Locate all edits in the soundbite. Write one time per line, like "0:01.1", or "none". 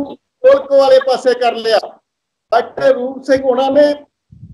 0:02.5